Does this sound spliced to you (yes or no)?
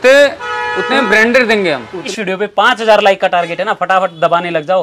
yes